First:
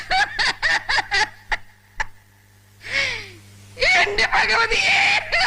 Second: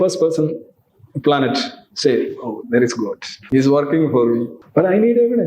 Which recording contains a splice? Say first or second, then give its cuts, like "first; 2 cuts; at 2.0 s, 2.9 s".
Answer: second; 2 cuts; at 3.3 s, 4.6 s